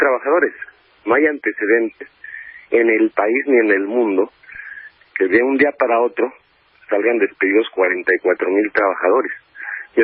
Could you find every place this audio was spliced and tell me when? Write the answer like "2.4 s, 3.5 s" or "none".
1.3 s